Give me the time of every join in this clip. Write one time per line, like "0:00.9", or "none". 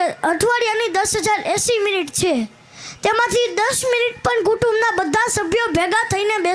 none